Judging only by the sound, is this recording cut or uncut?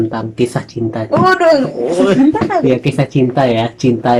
uncut